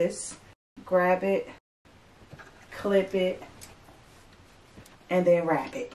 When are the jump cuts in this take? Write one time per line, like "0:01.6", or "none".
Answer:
none